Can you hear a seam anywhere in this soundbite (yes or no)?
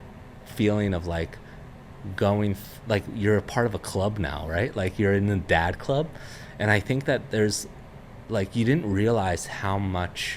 no